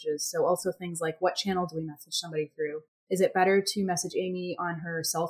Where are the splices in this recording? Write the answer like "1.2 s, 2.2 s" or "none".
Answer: 2.9 s